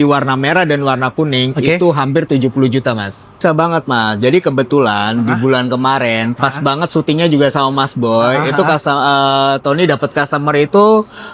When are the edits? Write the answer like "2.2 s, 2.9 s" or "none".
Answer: 3.4 s